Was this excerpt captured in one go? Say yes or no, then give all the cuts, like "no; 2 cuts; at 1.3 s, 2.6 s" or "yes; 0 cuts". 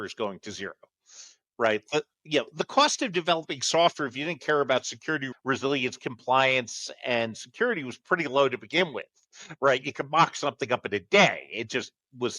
no; 1 cut; at 5.3 s